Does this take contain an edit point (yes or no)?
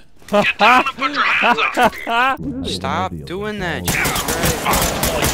yes